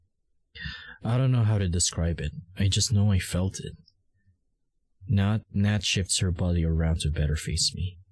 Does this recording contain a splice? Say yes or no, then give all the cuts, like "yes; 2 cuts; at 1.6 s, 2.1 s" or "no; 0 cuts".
no; 0 cuts